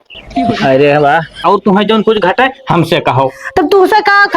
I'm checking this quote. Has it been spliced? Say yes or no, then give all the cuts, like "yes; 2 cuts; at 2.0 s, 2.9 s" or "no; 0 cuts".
yes; 1 cut; at 1.4 s